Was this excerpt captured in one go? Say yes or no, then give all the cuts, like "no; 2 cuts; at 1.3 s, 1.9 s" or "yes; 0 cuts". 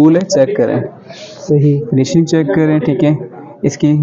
yes; 0 cuts